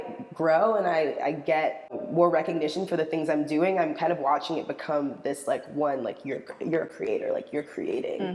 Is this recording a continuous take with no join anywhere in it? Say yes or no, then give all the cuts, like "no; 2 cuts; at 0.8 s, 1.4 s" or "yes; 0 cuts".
no; 1 cut; at 2.0 s